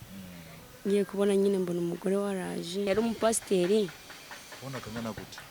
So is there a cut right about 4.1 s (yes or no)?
no